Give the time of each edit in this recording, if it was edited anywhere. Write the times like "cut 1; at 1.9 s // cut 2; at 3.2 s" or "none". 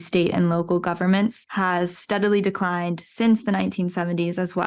cut 1; at 1.4 s